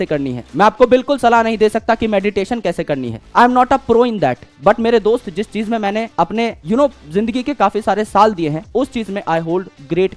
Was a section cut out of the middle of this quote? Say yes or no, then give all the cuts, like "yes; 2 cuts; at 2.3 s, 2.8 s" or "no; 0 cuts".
no; 0 cuts